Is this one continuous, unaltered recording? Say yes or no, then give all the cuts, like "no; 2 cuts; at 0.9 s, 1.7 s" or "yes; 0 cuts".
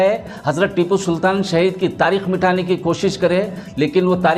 yes; 0 cuts